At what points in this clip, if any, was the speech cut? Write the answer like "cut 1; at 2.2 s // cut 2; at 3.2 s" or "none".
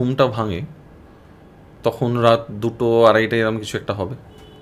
none